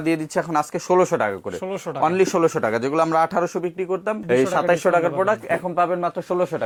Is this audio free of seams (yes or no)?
yes